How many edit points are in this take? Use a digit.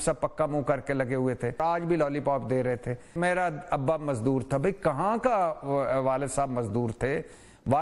2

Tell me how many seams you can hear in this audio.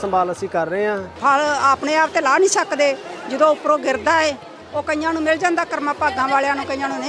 1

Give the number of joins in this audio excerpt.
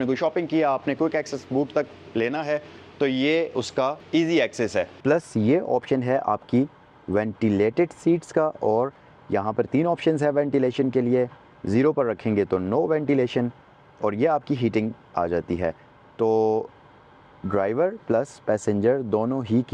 2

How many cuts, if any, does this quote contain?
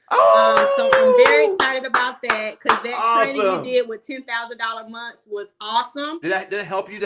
1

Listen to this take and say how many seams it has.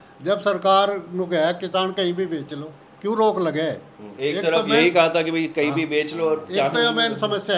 0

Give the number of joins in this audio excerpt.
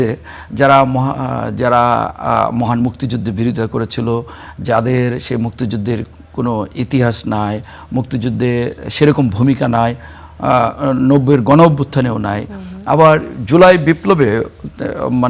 0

